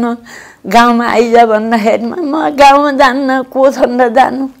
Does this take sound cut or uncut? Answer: uncut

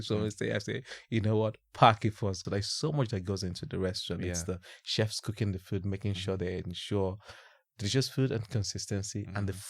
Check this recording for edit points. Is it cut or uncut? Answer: cut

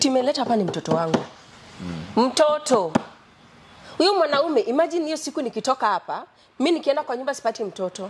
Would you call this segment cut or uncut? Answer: uncut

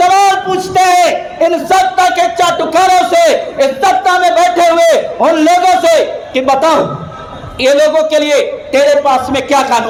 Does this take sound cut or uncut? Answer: uncut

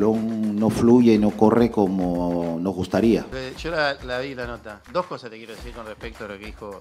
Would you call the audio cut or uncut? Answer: cut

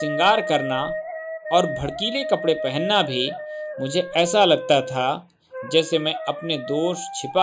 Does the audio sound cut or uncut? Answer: uncut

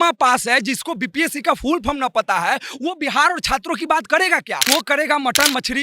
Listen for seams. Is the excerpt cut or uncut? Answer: cut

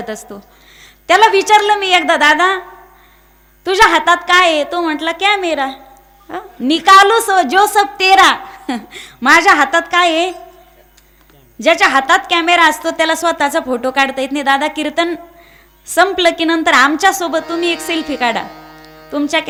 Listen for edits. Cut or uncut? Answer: uncut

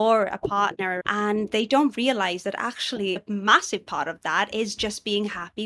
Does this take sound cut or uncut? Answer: cut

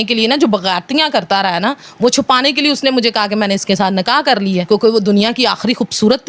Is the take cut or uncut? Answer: uncut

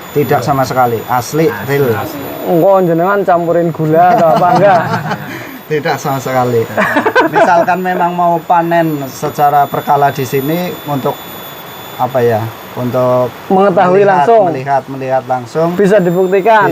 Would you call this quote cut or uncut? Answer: uncut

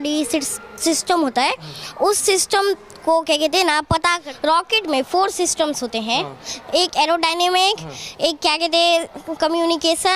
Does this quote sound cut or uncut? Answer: cut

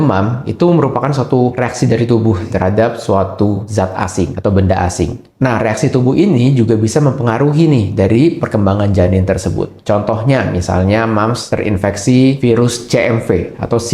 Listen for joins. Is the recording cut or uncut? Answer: cut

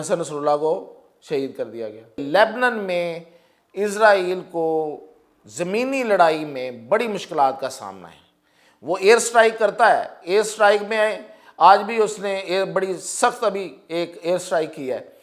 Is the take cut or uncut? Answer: cut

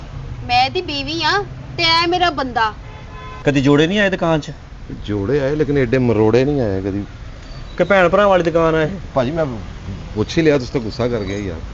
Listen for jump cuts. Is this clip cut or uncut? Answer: uncut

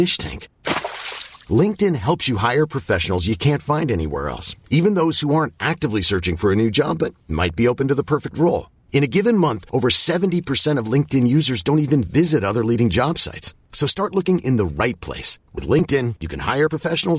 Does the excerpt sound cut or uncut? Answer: uncut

